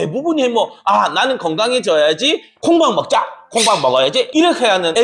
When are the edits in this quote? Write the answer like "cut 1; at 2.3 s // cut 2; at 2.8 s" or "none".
cut 1; at 2.5 s